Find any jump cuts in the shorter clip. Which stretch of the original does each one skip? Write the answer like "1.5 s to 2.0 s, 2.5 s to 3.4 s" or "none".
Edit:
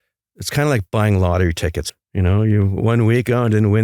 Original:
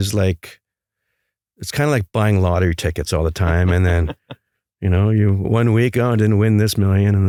3.0 s to 4.5 s